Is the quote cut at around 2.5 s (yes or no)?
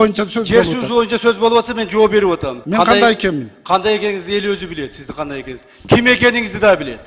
yes